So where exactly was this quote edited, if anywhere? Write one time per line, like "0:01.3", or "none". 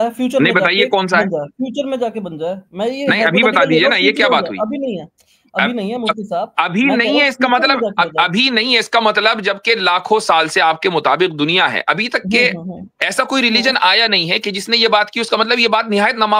none